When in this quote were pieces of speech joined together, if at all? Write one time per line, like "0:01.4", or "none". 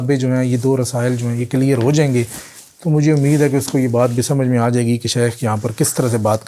none